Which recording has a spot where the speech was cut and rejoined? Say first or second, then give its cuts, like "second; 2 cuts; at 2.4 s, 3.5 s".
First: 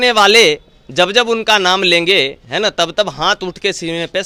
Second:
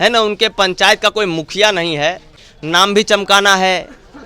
second; 1 cut; at 2.3 s